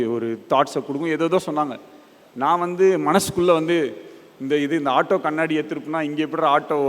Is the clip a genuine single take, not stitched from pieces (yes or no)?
yes